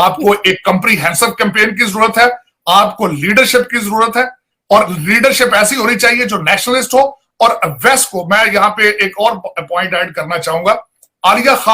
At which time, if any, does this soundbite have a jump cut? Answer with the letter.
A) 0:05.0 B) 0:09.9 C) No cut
C